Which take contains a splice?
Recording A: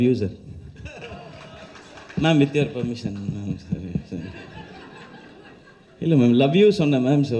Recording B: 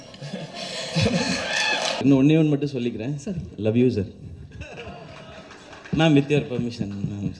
B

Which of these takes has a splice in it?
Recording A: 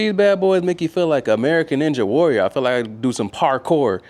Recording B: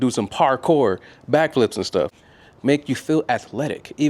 B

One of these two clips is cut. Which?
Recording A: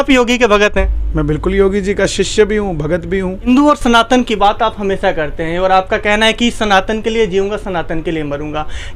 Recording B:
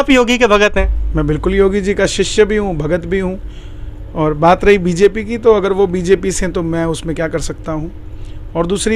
A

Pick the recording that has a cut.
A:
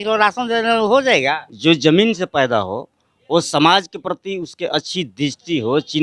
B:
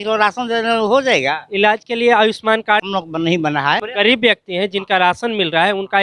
A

